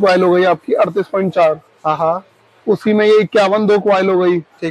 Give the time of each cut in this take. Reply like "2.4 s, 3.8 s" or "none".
none

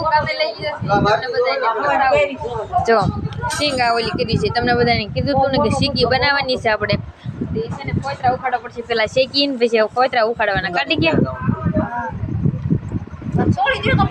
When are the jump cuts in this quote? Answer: none

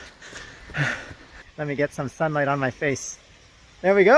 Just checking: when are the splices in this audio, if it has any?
1.4 s

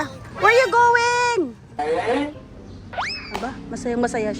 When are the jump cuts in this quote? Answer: 1.7 s

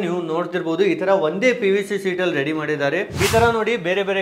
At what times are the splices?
3.1 s

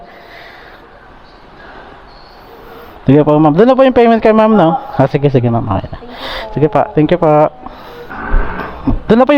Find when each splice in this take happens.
8.2 s

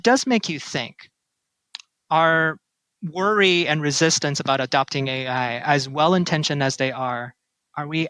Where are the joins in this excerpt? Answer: none

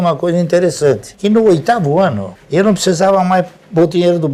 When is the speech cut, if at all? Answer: none

